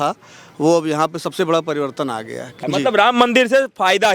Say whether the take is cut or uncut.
cut